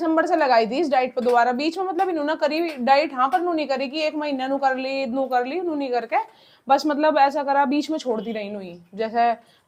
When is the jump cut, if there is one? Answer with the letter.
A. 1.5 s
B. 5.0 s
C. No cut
C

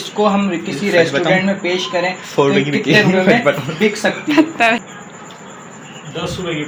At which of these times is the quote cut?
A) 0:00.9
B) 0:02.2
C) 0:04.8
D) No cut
C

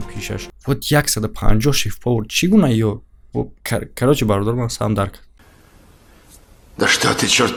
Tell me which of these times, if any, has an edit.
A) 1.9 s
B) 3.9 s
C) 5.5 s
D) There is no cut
D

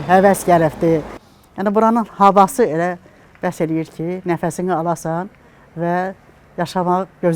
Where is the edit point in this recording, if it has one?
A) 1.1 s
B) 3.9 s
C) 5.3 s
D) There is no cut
A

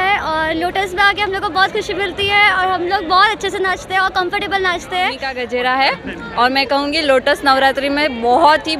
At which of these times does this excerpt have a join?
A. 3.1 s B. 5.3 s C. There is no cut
B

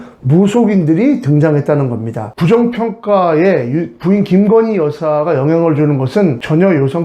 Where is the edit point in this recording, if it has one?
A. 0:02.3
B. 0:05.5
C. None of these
A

